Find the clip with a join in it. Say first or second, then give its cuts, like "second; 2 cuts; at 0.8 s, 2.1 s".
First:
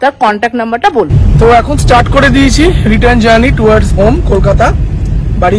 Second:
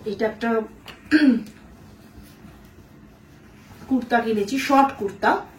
first; 1 cut; at 1.5 s